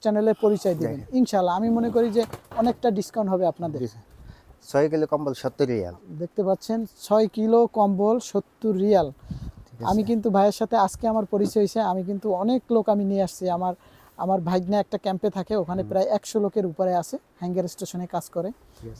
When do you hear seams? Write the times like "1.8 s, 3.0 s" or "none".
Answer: none